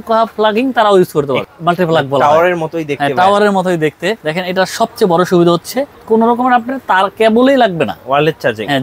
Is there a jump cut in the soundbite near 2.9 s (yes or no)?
no